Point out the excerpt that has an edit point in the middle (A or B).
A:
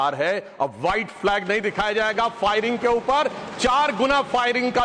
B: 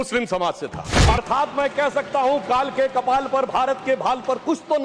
B